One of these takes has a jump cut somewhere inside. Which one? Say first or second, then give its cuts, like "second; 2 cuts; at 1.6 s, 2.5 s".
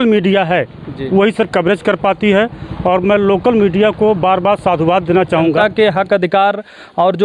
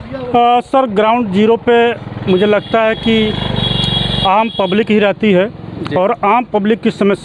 first; 1 cut; at 5.6 s